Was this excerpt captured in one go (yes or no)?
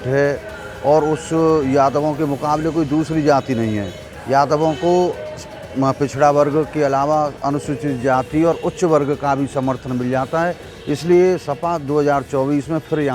yes